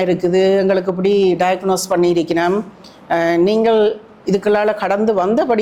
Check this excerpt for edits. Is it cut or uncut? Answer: uncut